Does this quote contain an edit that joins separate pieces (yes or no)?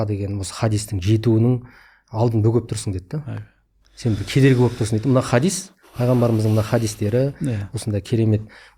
no